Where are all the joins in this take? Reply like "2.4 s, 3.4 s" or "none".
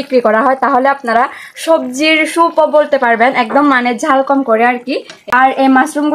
5.1 s